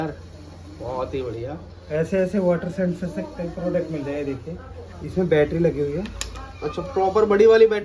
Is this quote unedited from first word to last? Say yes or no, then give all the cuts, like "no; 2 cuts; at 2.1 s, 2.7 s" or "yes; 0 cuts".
yes; 0 cuts